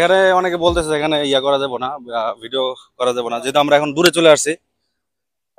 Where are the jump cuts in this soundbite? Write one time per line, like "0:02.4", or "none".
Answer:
none